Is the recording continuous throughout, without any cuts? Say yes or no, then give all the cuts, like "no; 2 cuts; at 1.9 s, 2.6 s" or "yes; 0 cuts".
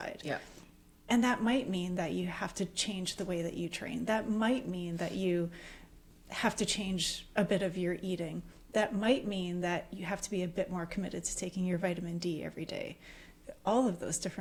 yes; 0 cuts